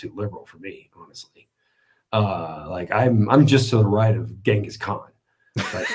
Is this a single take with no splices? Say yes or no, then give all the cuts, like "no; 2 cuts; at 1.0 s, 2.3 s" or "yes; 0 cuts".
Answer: yes; 0 cuts